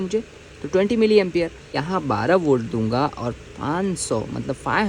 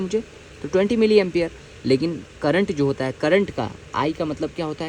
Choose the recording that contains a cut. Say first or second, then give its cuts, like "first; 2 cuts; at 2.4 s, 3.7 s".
first; 1 cut; at 1.8 s